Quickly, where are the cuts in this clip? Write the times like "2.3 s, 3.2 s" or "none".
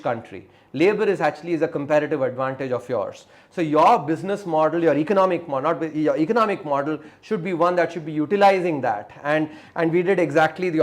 none